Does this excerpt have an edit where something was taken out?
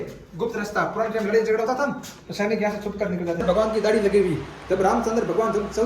yes; 1 cut; at 3.4 s

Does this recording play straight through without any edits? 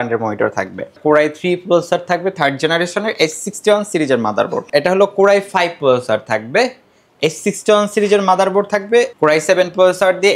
no; 3 cuts; at 1.0 s, 4.6 s, 9.1 s

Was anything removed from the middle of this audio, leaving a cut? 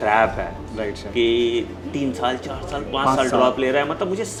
no; 0 cuts

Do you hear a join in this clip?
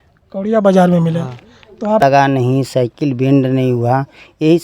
yes; 1 cut; at 2.0 s

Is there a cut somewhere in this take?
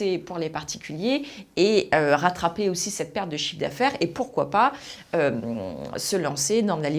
no; 0 cuts

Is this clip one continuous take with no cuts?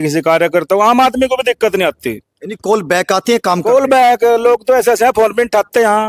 yes; 0 cuts

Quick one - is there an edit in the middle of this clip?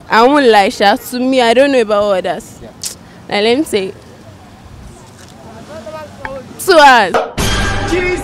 no; 0 cuts

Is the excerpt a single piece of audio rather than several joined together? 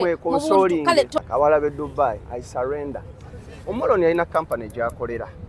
no; 1 cut; at 1.2 s

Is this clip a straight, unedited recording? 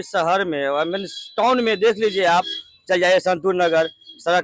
yes; 0 cuts

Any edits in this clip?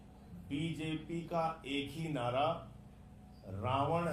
no; 0 cuts

